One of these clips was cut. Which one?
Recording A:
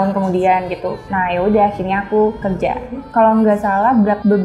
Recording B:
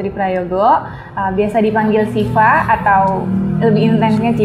A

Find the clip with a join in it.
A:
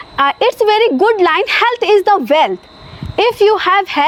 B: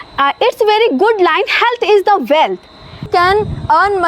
B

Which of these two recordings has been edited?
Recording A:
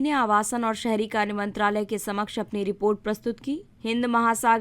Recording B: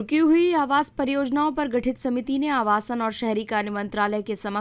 A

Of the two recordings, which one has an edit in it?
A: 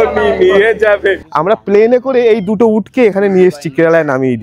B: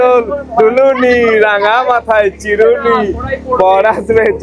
A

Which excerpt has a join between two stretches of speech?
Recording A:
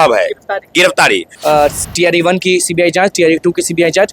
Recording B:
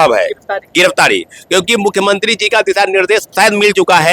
A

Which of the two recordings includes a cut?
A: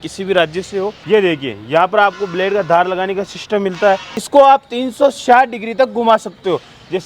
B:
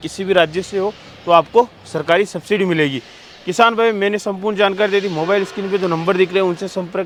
A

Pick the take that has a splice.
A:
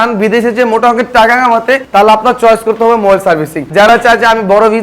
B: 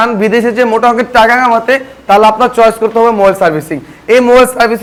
A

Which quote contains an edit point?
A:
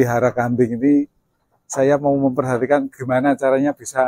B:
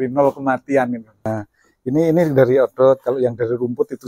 B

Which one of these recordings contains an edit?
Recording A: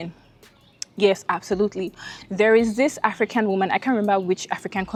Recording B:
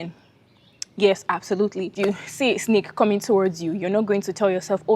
B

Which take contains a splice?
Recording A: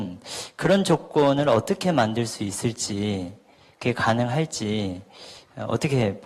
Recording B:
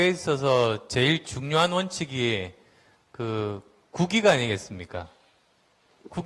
B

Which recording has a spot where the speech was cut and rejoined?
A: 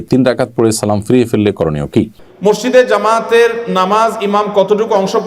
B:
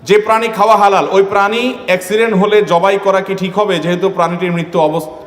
A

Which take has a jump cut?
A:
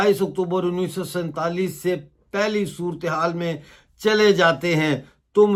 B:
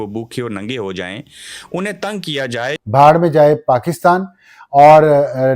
B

